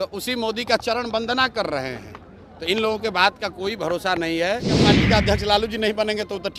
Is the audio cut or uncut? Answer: cut